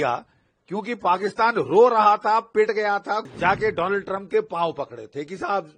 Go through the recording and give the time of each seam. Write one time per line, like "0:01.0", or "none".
0:03.2